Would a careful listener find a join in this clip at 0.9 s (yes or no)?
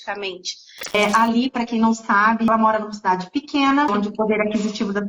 yes